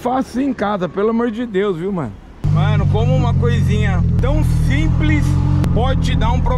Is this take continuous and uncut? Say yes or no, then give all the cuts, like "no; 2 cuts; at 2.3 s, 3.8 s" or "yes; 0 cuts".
no; 3 cuts; at 2.5 s, 4.2 s, 5.6 s